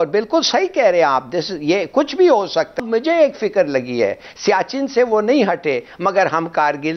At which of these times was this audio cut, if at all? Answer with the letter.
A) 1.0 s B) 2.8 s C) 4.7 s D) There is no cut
B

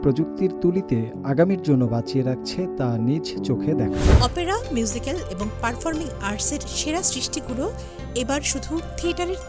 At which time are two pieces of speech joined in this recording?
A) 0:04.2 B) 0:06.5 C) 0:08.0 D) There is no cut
A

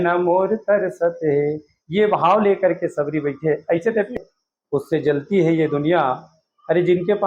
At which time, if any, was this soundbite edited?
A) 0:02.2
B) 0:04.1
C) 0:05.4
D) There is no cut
B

